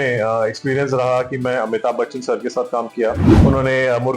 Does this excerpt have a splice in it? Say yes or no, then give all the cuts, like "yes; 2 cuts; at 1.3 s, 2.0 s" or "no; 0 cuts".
yes; 1 cut; at 3.3 s